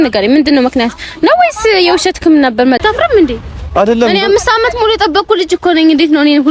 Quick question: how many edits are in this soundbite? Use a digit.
1